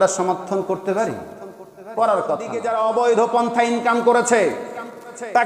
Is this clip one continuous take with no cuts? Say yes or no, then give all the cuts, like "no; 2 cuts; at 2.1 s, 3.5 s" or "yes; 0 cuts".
no; 1 cut; at 2.6 s